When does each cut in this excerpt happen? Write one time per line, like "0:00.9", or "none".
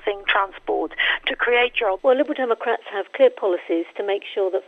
0:02.0